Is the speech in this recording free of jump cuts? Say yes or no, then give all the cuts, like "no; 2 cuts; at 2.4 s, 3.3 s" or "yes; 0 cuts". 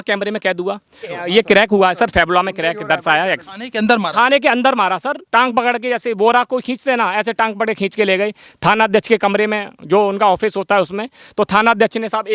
no; 3 cuts; at 1.1 s, 3.4 s, 5.1 s